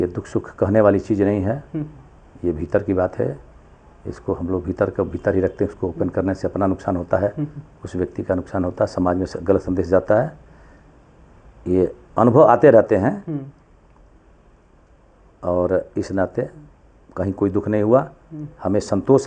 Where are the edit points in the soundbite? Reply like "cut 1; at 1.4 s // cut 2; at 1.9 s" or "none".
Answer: none